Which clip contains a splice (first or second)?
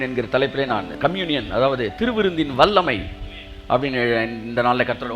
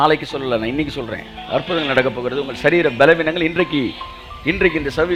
first